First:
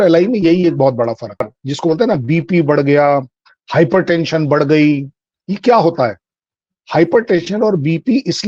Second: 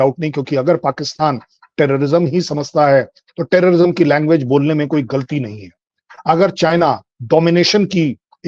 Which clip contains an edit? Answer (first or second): first